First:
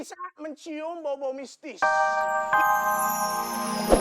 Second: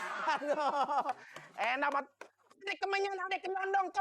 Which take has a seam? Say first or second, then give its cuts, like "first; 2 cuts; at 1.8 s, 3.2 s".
first; 1 cut; at 1.6 s